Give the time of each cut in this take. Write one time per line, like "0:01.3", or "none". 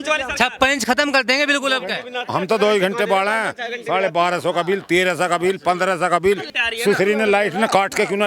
0:02.1
0:06.6